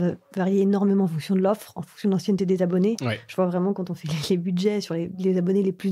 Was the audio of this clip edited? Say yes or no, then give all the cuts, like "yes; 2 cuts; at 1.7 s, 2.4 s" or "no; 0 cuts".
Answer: no; 0 cuts